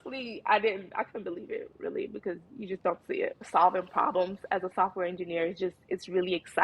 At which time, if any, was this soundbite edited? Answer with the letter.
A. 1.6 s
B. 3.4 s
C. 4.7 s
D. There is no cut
B